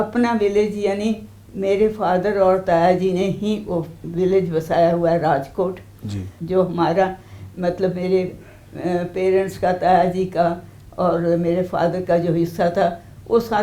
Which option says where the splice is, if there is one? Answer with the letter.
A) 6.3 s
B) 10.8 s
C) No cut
A